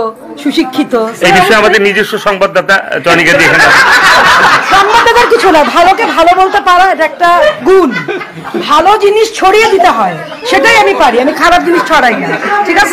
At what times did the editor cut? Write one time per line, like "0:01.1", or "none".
none

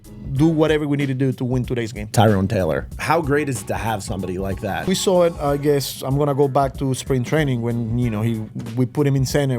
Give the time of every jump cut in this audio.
0:02.1
0:02.9
0:04.9

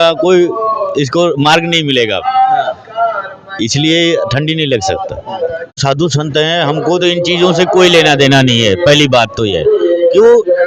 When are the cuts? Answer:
0:05.8

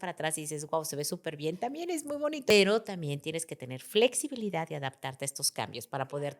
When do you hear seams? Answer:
0:02.5

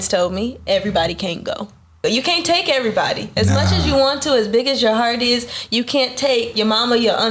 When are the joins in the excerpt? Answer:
0:02.0

